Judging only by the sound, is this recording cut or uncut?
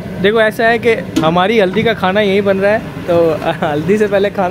uncut